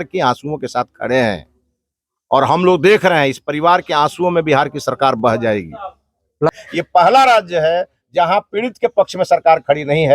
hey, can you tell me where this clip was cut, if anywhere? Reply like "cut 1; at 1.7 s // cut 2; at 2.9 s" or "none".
cut 1; at 6.5 s